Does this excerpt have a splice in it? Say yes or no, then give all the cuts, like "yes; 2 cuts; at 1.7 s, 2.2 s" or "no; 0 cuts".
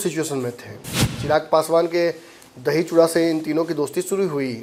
no; 0 cuts